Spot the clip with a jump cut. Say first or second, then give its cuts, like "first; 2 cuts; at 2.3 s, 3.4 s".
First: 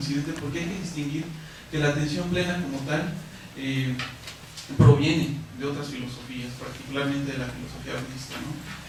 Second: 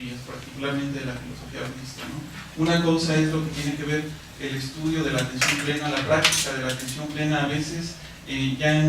second; 1 cut; at 6.8 s